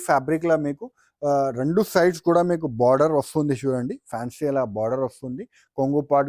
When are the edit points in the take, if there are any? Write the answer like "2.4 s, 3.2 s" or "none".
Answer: none